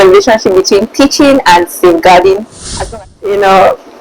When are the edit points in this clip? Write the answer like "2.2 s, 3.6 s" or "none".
2.8 s